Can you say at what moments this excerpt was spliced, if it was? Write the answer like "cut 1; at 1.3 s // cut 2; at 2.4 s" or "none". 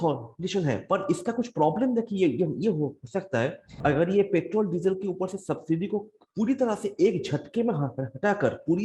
cut 1; at 3.7 s